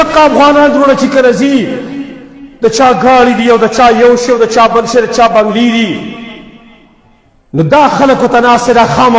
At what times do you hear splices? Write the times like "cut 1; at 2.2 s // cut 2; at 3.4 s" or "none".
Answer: none